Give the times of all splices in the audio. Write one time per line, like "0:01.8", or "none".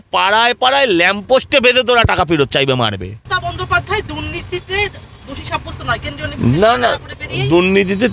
0:03.1